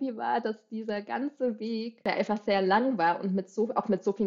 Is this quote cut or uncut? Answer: cut